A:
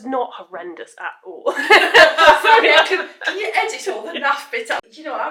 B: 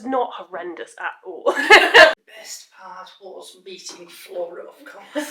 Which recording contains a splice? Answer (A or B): B